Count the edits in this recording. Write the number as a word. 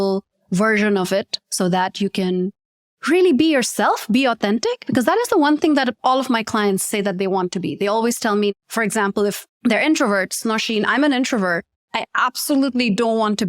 one